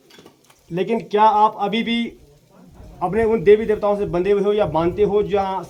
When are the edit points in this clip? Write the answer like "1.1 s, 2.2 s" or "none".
none